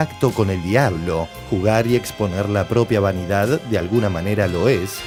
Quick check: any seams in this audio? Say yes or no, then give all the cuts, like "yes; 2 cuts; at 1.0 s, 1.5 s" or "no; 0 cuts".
no; 0 cuts